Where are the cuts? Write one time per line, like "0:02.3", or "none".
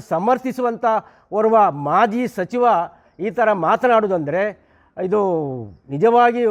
none

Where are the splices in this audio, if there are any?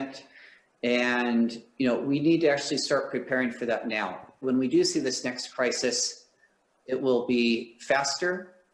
0:04.4

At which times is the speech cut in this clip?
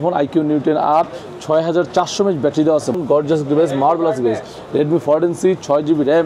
0:03.0

